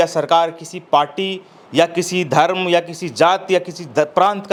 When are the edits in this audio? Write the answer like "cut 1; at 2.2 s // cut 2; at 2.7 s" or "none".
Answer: none